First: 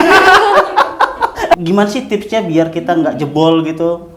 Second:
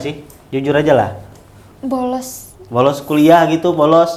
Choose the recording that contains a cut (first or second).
first